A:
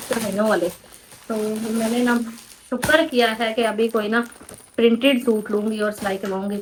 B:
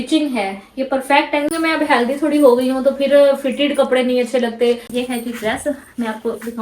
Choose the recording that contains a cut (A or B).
B